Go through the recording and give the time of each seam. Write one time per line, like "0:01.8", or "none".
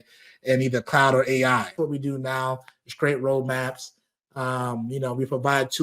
0:01.7